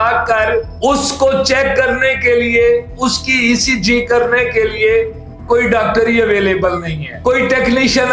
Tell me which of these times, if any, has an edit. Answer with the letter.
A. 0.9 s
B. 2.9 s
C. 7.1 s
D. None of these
D